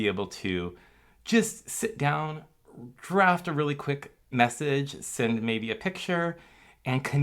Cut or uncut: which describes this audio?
cut